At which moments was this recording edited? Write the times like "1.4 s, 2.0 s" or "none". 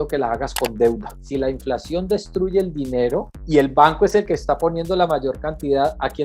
1.1 s